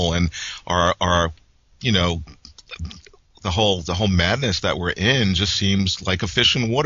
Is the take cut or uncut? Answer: cut